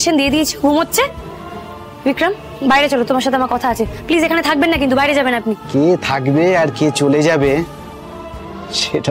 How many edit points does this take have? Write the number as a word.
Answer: one